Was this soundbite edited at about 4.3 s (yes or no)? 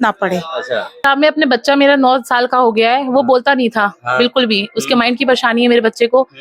no